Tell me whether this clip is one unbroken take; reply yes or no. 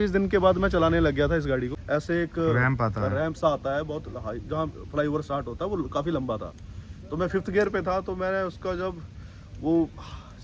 no